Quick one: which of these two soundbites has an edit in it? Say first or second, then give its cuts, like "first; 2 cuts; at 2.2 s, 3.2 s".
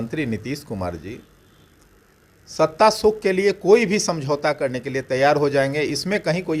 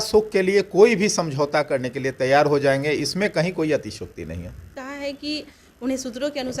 second; 1 cut; at 4.8 s